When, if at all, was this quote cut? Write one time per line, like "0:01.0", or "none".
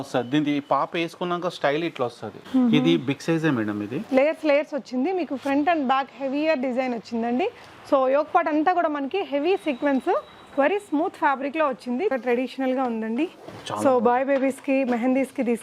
0:03.9
0:12.1

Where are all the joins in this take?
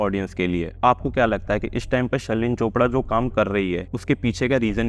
0:00.8
0:03.9

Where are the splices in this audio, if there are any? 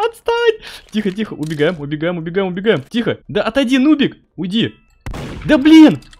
0:03.0

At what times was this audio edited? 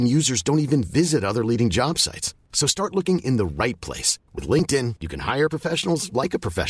none

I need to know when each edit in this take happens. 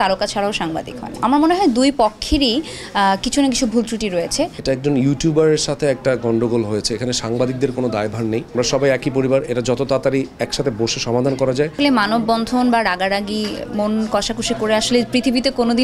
0:01.2
0:04.6
0:08.5
0:11.7

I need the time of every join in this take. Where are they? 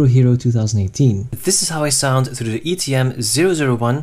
0:01.3

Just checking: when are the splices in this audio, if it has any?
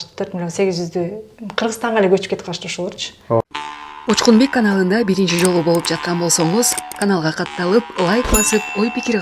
0:03.4

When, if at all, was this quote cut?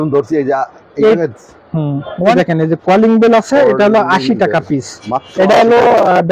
0:02.3

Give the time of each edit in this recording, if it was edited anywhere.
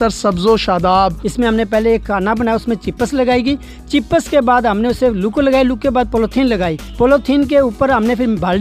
0:01.2

